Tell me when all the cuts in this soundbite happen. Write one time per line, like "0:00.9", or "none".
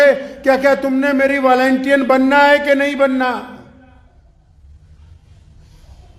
none